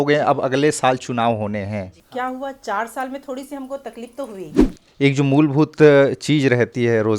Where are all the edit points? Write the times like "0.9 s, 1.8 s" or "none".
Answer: 2.0 s, 4.6 s